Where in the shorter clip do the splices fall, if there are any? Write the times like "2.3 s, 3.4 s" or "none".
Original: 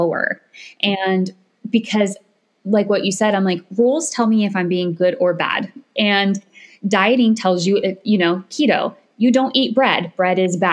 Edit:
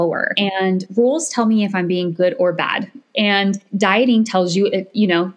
0.8 s, 3.7 s